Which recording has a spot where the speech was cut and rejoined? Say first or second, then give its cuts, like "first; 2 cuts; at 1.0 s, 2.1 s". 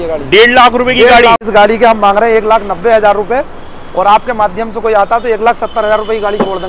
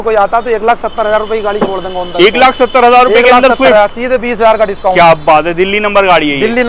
first; 1 cut; at 1.4 s